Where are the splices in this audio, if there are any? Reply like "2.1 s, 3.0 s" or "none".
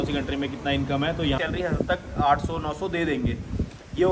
1.4 s